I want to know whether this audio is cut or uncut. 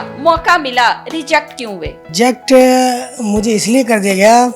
cut